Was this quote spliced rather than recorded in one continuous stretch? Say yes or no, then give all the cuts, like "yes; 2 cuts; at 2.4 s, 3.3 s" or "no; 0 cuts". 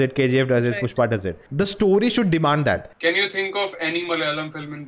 yes; 2 cuts; at 1.4 s, 2.9 s